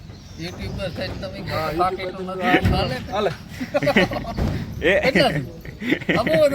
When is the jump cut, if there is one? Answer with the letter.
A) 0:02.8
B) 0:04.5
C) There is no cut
A